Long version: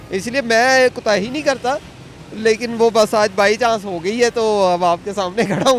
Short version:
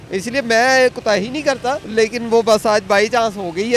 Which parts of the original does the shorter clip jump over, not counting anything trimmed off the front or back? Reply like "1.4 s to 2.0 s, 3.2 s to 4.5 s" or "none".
1.8 s to 2.3 s